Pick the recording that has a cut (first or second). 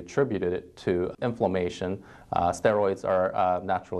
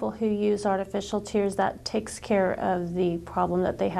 first